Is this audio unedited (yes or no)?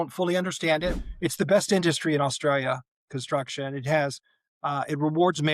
no